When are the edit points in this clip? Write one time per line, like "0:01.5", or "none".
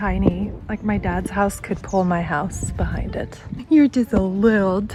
none